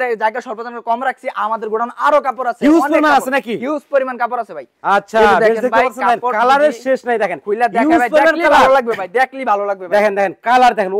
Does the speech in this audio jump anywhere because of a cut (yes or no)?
no